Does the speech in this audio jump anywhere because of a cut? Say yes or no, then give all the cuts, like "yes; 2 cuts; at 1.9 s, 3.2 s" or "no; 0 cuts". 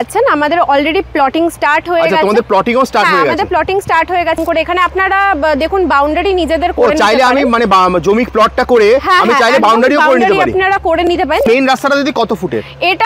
yes; 2 cuts; at 4.4 s, 11.5 s